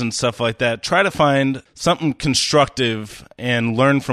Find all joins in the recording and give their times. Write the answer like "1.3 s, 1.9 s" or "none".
1.7 s